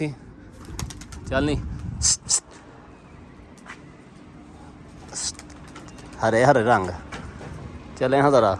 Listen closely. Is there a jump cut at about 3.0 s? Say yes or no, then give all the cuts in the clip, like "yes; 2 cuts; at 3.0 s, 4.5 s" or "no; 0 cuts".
no; 0 cuts